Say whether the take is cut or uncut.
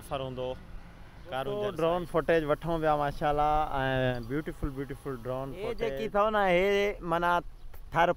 cut